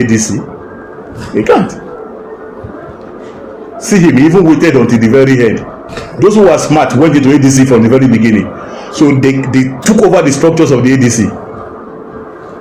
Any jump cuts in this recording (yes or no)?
no